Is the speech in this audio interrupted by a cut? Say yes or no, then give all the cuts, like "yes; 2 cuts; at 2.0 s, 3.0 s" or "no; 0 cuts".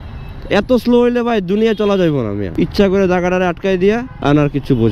yes; 2 cuts; at 2.4 s, 4.1 s